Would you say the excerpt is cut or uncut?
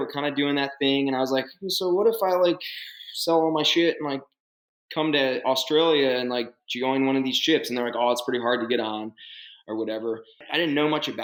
uncut